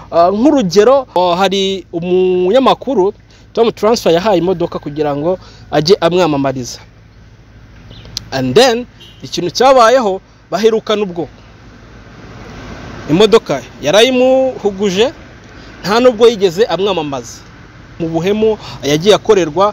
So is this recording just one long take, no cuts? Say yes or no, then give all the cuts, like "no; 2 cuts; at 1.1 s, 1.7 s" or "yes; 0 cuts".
no; 2 cuts; at 1.1 s, 18.0 s